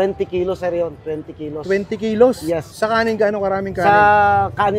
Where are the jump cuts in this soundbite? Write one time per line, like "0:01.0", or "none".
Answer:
0:02.7